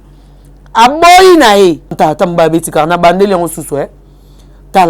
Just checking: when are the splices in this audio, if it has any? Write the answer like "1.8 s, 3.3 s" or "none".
1.9 s